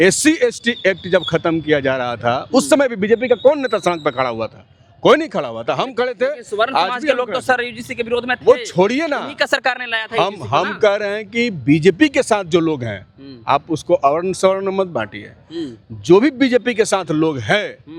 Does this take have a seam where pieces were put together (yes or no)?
no